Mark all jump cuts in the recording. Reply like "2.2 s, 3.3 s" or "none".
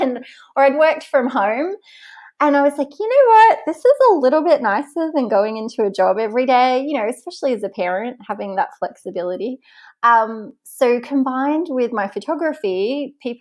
none

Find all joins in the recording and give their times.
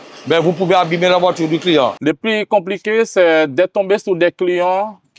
2.0 s

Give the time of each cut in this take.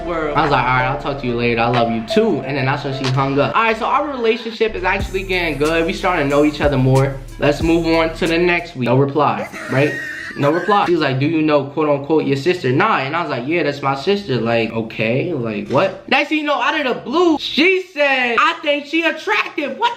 10.9 s, 16.1 s, 17.4 s

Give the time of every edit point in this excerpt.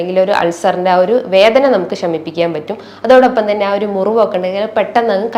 none

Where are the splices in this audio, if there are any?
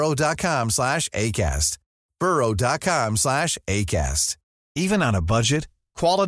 4.7 s

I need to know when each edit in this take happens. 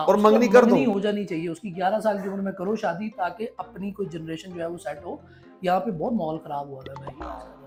none

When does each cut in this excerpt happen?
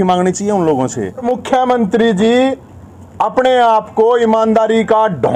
1.2 s

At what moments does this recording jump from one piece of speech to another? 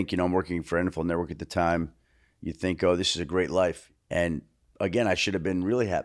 3.9 s

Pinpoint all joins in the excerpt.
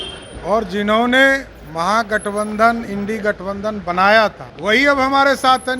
4.5 s

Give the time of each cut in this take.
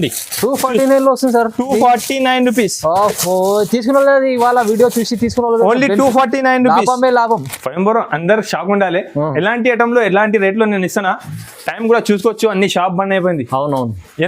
7.6 s

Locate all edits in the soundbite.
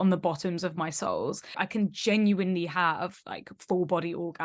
1.6 s

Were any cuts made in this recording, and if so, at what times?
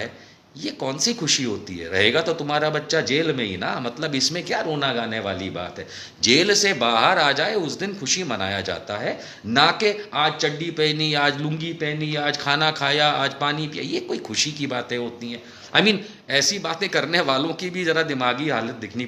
none

